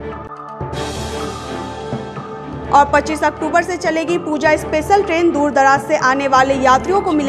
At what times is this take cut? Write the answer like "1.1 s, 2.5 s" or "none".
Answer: none